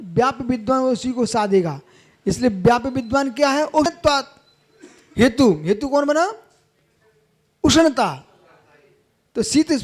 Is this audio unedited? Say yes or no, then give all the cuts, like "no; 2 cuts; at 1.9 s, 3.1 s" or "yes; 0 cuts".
no; 1 cut; at 3.9 s